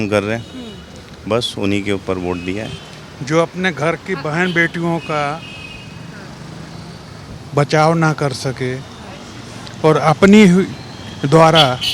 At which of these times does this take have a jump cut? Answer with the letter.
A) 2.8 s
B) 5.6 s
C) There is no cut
A